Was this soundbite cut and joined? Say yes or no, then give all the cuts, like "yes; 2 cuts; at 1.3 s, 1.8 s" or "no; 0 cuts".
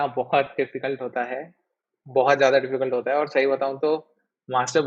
no; 0 cuts